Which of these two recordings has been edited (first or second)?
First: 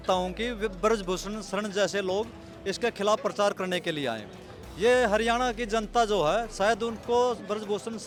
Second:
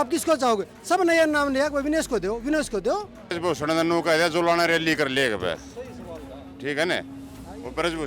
second